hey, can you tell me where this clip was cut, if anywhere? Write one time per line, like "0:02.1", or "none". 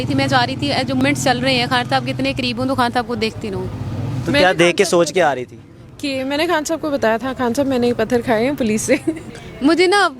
0:01.0
0:09.3